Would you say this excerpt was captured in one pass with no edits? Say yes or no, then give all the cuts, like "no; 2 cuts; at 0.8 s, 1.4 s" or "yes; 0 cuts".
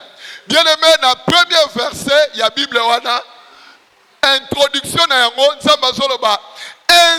yes; 0 cuts